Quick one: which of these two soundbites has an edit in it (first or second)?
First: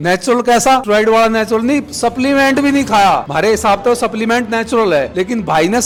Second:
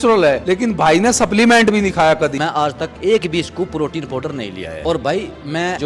second